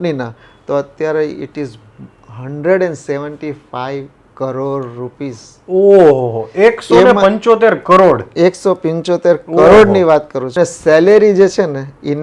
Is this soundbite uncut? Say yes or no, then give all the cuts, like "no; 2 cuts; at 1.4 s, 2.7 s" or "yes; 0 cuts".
no; 1 cut; at 10.5 s